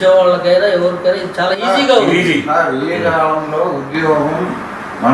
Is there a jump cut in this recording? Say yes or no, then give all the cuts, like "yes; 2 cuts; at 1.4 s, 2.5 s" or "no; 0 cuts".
no; 0 cuts